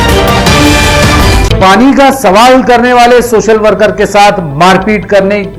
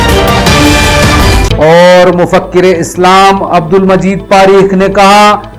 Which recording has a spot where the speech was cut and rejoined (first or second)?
first